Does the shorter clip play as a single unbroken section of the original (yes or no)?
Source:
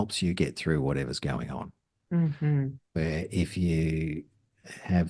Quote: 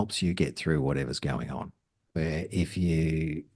no